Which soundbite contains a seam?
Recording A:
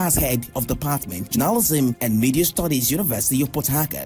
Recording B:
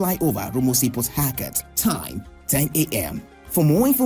A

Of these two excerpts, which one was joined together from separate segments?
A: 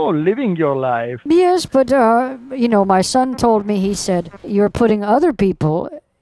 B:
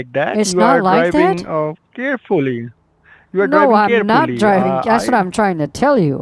A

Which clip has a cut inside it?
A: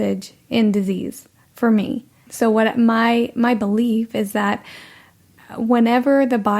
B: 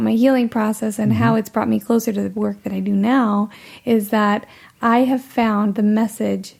A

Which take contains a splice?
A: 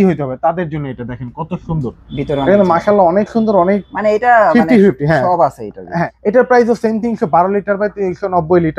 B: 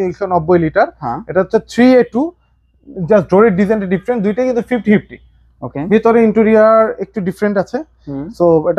A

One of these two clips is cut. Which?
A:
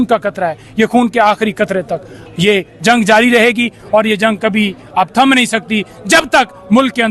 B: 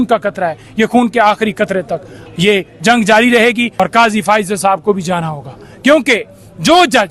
B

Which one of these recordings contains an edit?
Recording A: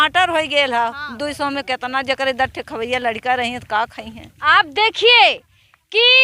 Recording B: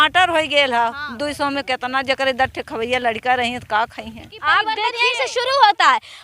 B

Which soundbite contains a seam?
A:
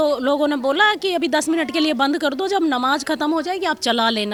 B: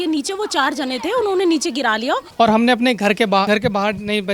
B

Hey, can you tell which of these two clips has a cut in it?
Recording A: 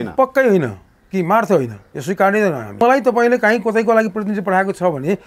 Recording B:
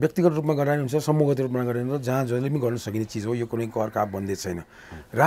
A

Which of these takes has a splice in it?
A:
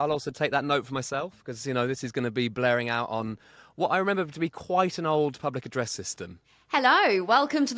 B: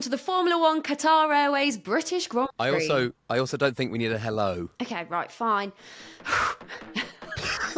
A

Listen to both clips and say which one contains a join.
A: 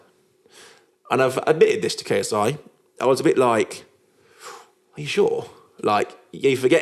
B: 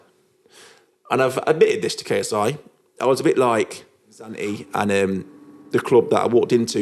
B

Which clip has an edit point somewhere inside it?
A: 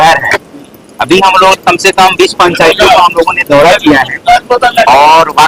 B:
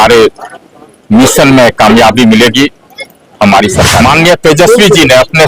B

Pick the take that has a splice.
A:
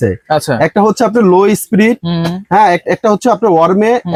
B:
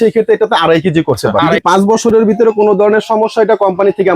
B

